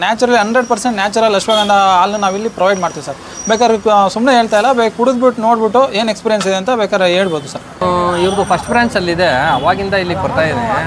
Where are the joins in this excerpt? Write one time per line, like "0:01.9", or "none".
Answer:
0:07.8